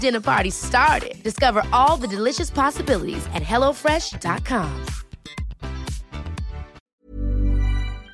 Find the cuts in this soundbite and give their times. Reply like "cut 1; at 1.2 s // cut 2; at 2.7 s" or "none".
cut 1; at 6.8 s